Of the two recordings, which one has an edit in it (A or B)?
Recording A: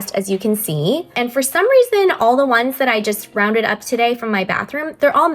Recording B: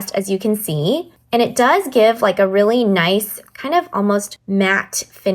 A